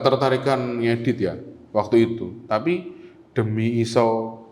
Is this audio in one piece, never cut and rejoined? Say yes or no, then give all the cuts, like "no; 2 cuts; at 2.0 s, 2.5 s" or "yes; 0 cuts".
yes; 0 cuts